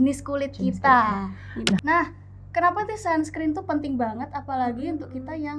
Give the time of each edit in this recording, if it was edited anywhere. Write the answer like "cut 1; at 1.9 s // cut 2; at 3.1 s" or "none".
cut 1; at 1.8 s

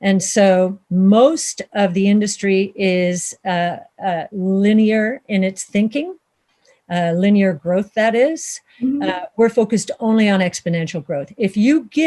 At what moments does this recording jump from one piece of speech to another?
none

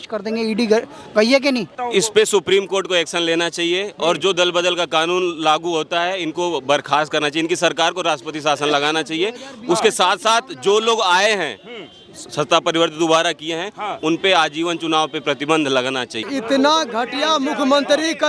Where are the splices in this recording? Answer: cut 1; at 1.8 s // cut 2; at 16.2 s

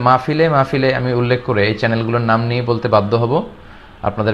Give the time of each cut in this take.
none

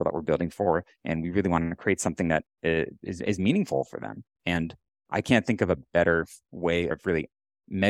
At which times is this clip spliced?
cut 1; at 7.0 s

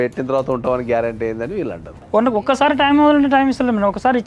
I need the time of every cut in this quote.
cut 1; at 2.0 s

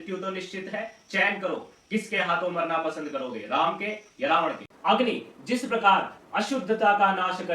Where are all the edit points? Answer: cut 1; at 4.7 s

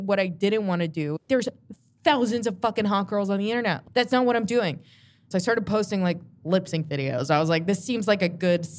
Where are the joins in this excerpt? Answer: cut 1; at 1.2 s // cut 2; at 5.3 s

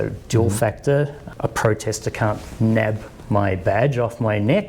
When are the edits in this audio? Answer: cut 1; at 1.2 s

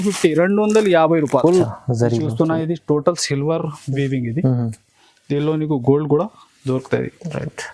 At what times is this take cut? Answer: cut 1; at 1.7 s

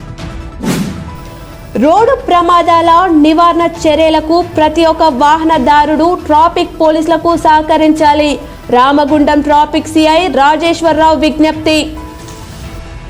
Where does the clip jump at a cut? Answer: cut 1; at 1.0 s

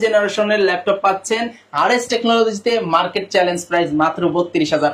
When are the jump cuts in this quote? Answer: none

